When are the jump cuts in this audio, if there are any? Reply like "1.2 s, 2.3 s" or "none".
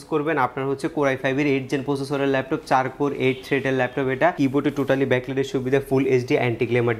4.4 s